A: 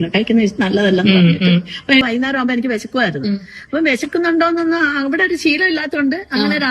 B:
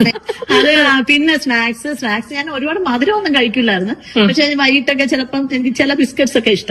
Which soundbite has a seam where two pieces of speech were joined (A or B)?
A